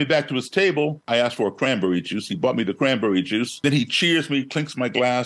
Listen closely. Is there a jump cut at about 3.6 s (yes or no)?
yes